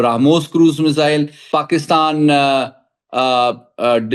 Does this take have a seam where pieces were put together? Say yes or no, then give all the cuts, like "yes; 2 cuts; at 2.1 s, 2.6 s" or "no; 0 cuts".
yes; 1 cut; at 1.4 s